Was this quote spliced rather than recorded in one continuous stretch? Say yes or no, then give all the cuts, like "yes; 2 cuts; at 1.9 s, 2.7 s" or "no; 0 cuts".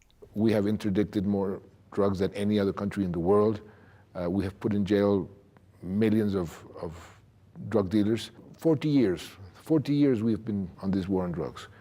no; 0 cuts